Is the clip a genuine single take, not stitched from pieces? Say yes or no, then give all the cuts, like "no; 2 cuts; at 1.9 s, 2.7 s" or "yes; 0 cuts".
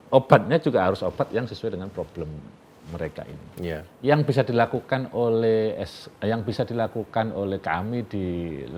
yes; 0 cuts